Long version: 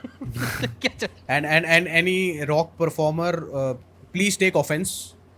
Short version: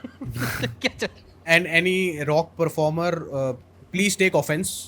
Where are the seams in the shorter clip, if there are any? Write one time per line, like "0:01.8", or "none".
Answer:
0:01.4